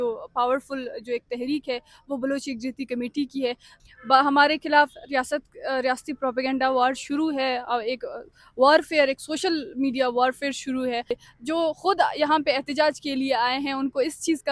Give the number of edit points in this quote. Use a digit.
2